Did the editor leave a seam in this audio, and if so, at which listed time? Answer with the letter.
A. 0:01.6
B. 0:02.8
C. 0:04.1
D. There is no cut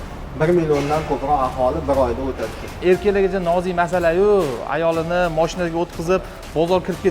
B